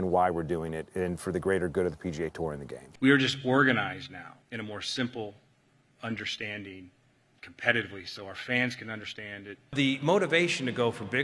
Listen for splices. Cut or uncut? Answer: cut